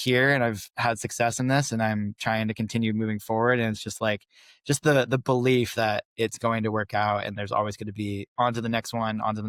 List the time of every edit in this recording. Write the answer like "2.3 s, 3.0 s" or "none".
none